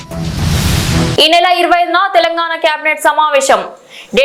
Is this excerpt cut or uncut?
uncut